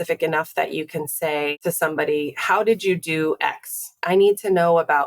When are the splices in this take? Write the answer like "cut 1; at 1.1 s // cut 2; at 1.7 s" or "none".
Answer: cut 1; at 1.6 s // cut 2; at 4.0 s